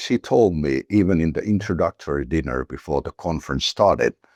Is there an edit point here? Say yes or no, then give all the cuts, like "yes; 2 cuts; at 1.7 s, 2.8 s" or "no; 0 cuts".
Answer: no; 0 cuts